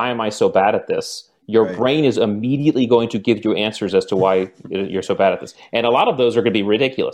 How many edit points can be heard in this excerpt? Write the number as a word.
zero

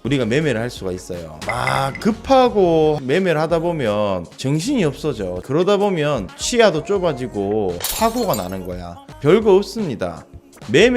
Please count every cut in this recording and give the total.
zero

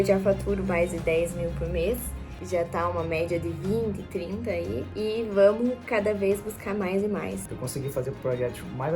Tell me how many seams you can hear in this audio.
one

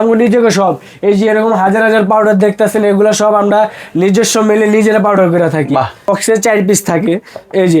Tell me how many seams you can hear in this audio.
one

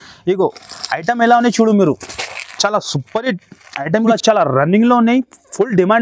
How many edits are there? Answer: one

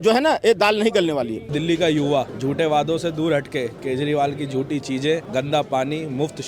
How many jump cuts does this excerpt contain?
three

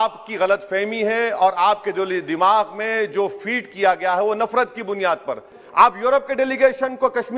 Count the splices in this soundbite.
one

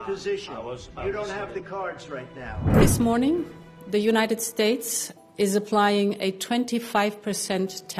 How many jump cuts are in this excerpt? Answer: one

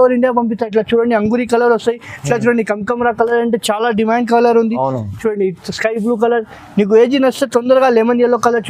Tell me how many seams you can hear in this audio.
zero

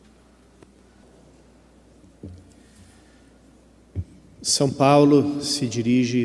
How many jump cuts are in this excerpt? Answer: one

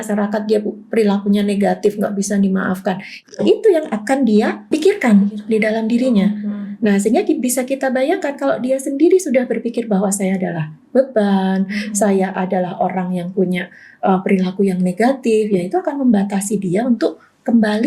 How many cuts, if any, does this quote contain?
one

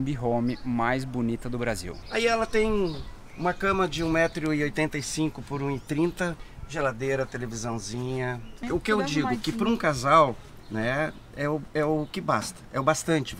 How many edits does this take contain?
three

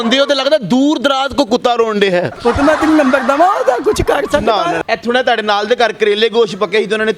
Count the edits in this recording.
one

